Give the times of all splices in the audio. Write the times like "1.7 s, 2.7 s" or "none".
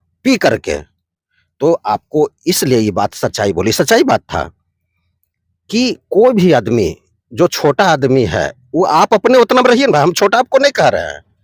none